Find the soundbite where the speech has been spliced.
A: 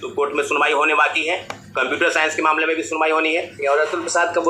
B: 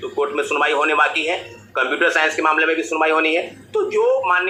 A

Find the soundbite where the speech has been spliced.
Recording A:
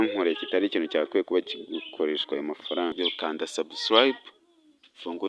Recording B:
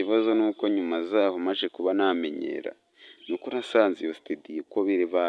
A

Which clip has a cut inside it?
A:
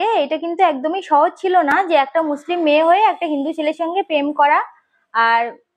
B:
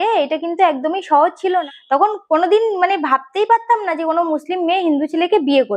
B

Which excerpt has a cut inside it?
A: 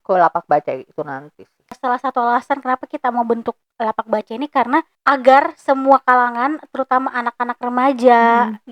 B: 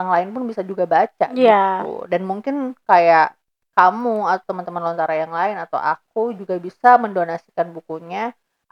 A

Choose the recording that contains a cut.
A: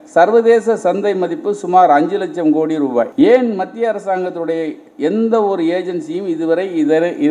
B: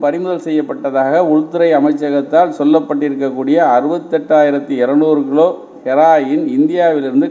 A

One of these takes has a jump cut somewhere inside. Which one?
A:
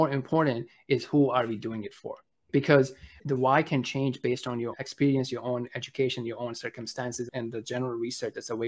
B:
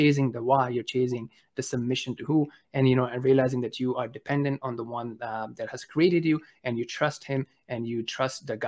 A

